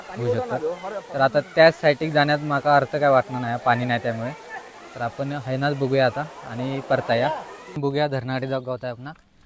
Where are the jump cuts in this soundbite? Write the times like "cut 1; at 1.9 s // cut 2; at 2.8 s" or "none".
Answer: cut 1; at 7.8 s